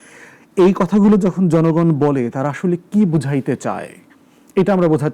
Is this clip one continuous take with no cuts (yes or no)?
yes